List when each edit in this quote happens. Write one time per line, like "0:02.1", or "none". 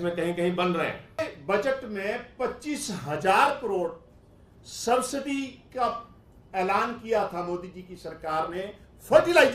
0:01.2